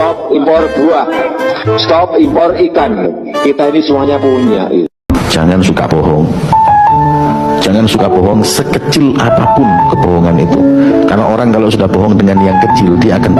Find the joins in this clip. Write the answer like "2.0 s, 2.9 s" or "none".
none